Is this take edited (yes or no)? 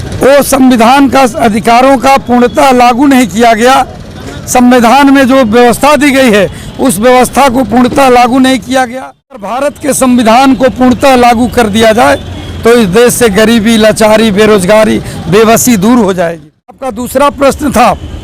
yes